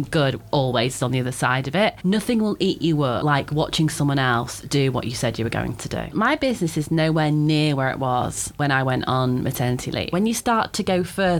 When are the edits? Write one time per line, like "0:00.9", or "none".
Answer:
0:02.0
0:03.2
0:06.1
0:08.5
0:10.1